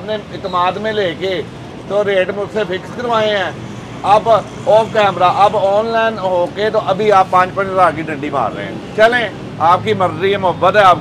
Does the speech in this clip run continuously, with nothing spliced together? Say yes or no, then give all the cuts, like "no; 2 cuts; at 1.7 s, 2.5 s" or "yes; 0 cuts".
yes; 0 cuts